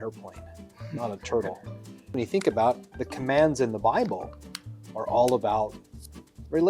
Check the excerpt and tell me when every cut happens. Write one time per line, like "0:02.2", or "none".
0:02.1

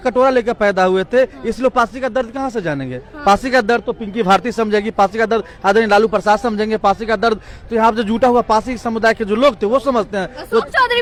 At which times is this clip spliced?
none

